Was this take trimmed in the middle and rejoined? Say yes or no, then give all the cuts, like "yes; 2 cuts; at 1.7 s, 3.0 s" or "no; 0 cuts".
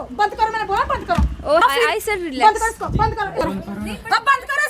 yes; 2 cuts; at 1.6 s, 3.4 s